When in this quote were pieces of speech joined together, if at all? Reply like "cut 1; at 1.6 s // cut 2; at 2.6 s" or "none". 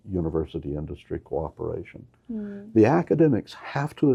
none